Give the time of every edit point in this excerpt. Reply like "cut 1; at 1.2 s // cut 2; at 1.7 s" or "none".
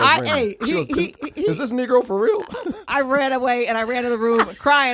none

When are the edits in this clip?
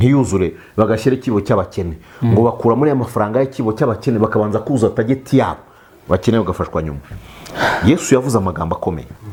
none

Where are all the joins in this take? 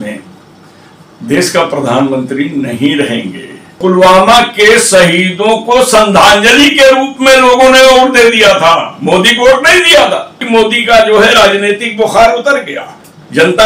cut 1; at 3.8 s // cut 2; at 10.4 s

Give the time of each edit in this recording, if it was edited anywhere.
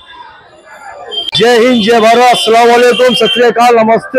cut 1; at 1.2 s

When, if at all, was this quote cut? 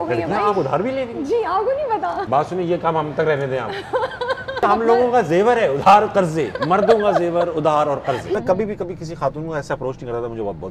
cut 1; at 2.2 s // cut 2; at 4.6 s // cut 3; at 8.3 s

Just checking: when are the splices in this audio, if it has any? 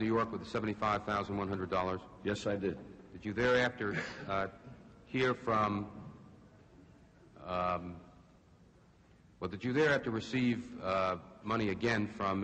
none

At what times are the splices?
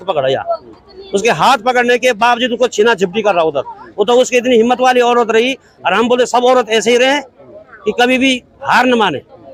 none

